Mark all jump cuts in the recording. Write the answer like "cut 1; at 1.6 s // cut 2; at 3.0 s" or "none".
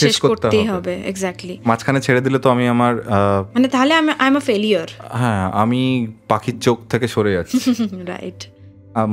none